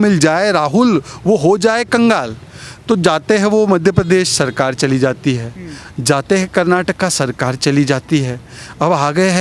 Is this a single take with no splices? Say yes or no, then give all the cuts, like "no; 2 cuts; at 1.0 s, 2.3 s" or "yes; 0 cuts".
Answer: yes; 0 cuts